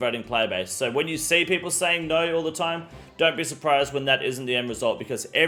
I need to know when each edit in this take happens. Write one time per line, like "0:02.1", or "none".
none